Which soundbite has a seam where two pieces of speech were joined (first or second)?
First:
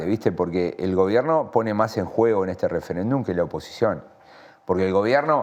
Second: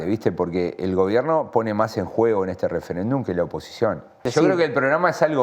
second